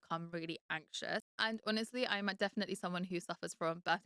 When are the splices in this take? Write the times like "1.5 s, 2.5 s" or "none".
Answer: 1.3 s

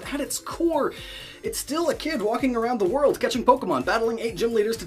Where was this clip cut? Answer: none

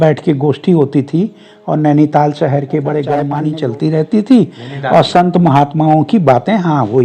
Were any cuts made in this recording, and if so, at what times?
3.4 s

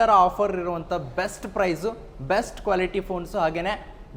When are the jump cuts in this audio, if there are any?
none

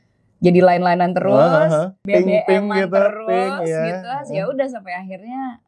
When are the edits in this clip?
2.0 s

